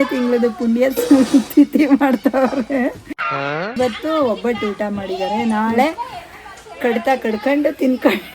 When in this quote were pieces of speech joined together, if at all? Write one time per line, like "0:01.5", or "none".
0:03.1